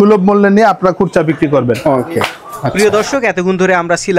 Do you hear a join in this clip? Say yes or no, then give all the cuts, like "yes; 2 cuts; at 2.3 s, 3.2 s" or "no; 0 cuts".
no; 0 cuts